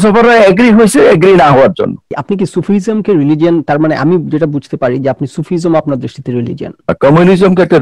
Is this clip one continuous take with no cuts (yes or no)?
no